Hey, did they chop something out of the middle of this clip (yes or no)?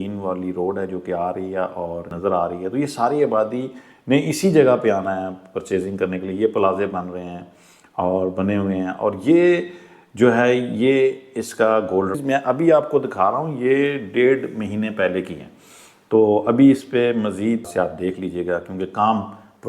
yes